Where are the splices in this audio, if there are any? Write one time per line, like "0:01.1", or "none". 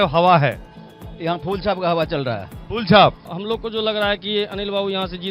0:03.3

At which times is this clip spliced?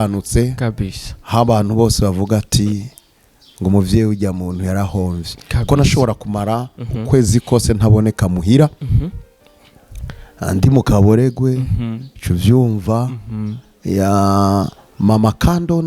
none

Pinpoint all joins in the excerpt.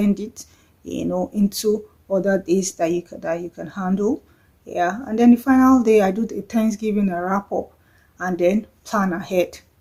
none

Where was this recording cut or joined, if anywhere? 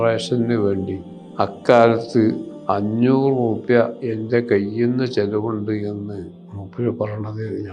none

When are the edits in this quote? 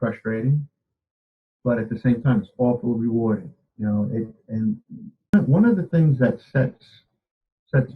0:05.3

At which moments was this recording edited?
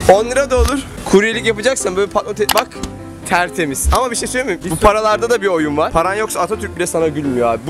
0:00.9

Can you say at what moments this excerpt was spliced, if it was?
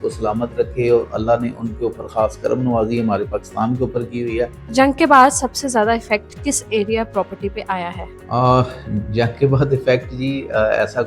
0:04.5

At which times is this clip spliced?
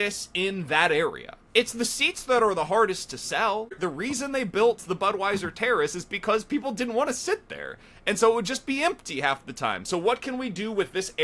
0:03.8

